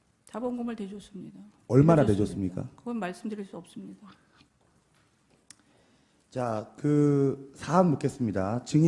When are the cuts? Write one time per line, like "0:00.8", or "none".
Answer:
none